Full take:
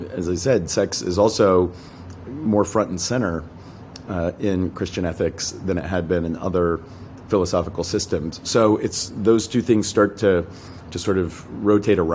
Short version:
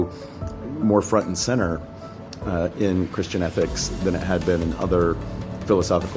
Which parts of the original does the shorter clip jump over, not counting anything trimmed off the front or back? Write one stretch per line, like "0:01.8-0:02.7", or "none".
none